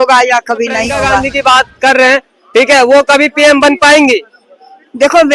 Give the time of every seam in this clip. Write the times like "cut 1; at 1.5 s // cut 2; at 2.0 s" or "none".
cut 1; at 1.3 s